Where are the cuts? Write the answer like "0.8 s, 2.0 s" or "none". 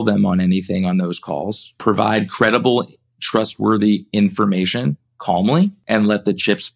1.6 s, 5.8 s